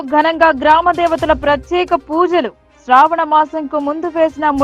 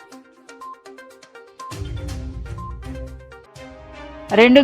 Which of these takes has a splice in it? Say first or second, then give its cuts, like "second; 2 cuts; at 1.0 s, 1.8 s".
second; 2 cuts; at 1.2 s, 3.4 s